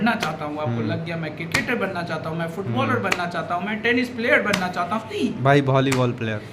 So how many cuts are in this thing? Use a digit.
1